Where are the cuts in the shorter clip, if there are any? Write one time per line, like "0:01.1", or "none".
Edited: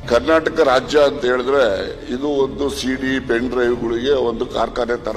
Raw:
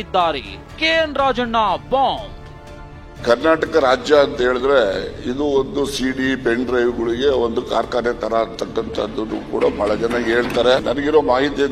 none